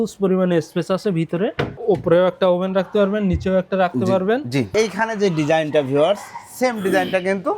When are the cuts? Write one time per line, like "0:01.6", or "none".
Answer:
0:01.8
0:04.7